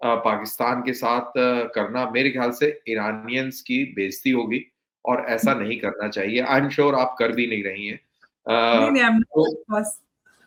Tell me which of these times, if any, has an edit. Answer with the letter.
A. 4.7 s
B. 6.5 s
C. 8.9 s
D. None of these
D